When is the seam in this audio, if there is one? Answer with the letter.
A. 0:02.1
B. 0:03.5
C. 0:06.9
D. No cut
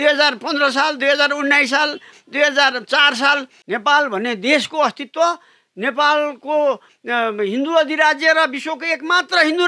B